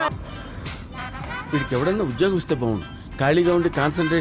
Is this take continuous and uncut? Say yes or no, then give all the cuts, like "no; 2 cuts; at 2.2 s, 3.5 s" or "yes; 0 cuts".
yes; 0 cuts